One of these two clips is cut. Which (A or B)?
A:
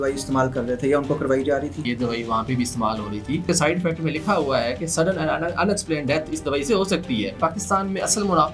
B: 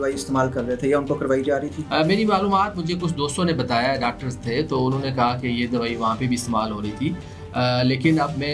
A